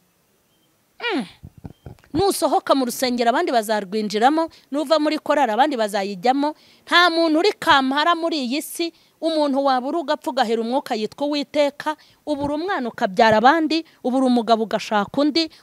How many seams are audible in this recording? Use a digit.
0